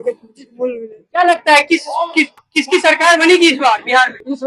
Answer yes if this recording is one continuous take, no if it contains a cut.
yes